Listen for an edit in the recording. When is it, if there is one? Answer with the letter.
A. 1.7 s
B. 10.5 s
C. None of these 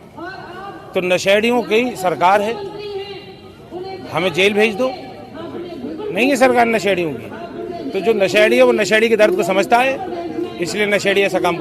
C